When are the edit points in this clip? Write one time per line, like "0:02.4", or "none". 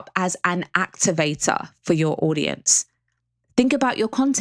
0:01.7